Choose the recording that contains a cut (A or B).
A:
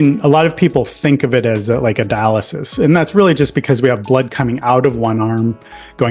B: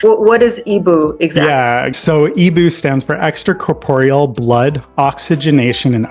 B